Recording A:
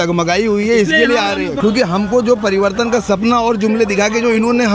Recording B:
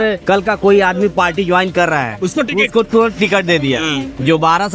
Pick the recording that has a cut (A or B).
A